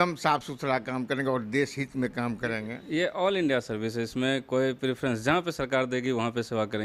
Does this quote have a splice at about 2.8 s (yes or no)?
yes